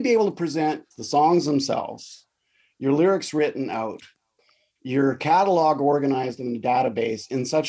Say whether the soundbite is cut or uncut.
cut